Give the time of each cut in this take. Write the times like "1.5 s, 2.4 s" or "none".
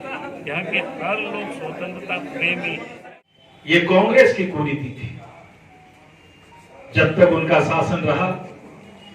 3.0 s